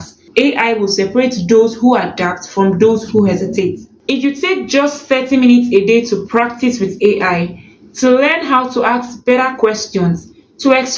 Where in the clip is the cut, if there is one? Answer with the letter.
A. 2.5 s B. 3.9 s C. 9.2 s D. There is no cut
B